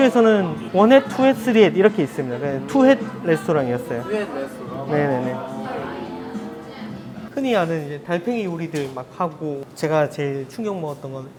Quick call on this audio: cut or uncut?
uncut